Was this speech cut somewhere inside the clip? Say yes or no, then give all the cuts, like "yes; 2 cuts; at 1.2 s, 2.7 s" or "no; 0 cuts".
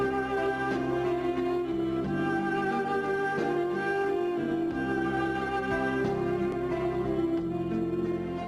yes; 1 cut; at 5.8 s